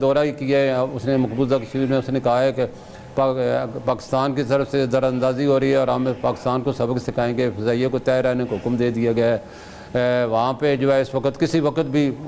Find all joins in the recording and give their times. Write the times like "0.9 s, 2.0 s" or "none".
none